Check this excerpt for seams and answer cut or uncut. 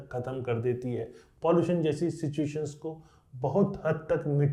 uncut